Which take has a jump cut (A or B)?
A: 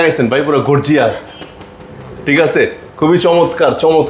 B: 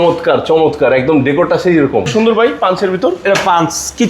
B